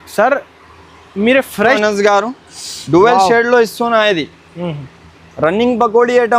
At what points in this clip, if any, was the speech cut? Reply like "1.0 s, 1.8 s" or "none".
1.8 s